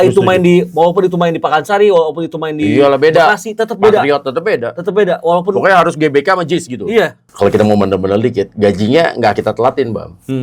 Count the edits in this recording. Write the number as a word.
one